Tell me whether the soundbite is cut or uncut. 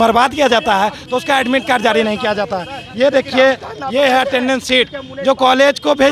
uncut